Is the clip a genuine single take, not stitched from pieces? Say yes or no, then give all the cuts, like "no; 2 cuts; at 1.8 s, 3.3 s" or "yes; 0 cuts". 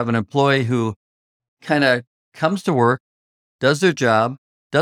yes; 0 cuts